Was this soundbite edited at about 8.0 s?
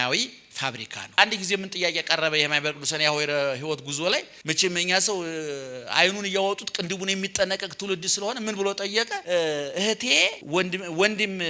no; 4 cuts; at 1.2 s, 4.3 s, 9.2 s, 10.4 s

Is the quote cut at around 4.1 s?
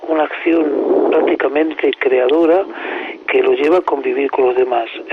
no; 0 cuts

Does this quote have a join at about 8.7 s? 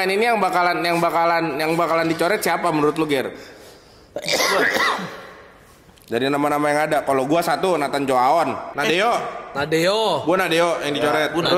yes; 1 cut; at 8.7 s

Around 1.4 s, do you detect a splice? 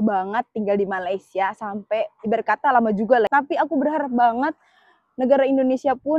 no; 1 cut; at 3.3 s

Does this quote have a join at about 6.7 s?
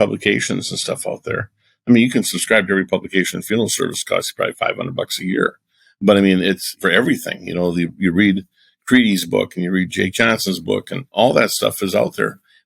yes; 2 cuts; at 6.7 s, 11.1 s

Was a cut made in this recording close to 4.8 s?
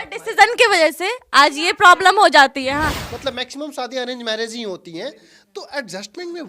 no; 1 cut; at 3.1 s

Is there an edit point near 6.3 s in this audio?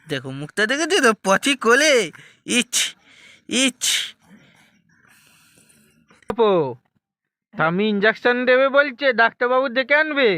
yes; 1 cut; at 6.3 s

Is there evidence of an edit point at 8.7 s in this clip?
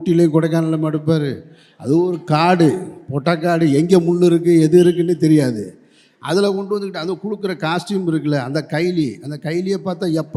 no; 0 cuts

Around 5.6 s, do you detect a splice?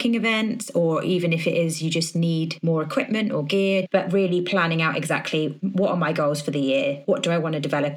yes; 4 cuts; at 2.5 s, 3.9 s, 5.6 s, 7.0 s

